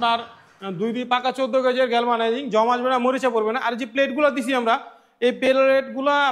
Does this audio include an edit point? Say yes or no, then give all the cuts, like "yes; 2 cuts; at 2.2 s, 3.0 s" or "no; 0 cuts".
no; 0 cuts